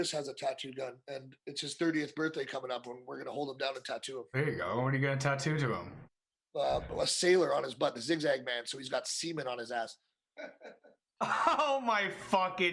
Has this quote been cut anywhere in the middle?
no; 0 cuts

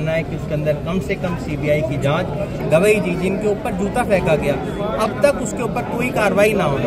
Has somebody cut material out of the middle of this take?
yes; 1 cut; at 2.6 s

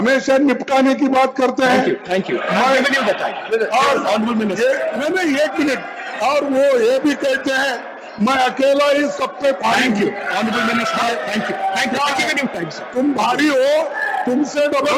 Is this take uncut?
yes; 0 cuts

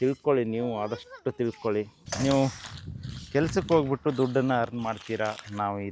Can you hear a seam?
yes; 1 cut; at 2.0 s

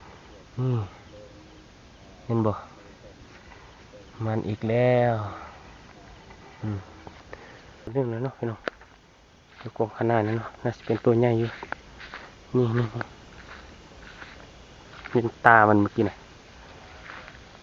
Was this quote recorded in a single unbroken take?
no; 1 cut; at 7.9 s

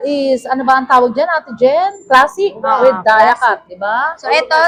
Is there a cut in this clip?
no; 0 cuts

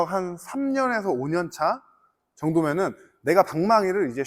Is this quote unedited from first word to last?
yes; 0 cuts

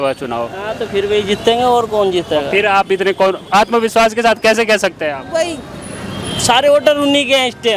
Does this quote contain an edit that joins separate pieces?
no; 0 cuts

